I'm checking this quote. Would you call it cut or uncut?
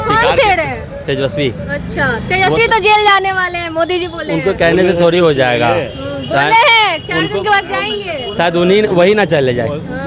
uncut